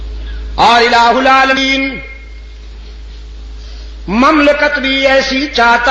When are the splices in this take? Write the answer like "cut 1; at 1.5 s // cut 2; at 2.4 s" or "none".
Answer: cut 1; at 1.5 s